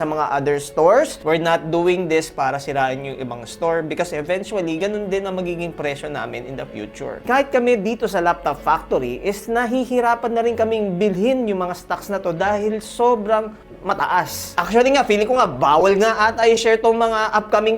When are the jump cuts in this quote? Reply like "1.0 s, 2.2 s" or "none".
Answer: 1.1 s, 7.1 s, 14.5 s